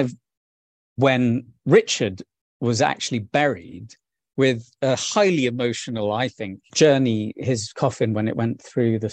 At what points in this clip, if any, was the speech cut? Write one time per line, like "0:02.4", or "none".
0:04.2
0:06.6